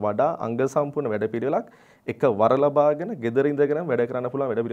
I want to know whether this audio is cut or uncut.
uncut